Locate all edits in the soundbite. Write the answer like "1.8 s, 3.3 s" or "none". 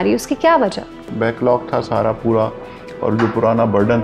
1.1 s